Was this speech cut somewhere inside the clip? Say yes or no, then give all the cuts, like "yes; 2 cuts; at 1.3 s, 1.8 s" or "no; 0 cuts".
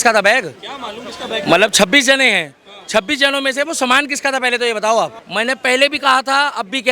yes; 1 cut; at 5.2 s